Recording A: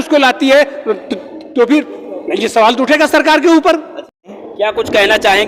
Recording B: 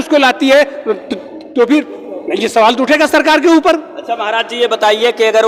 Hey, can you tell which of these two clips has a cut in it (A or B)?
A